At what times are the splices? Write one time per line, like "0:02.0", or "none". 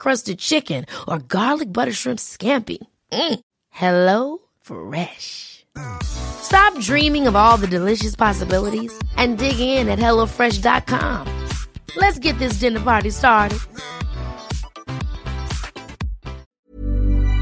0:16.4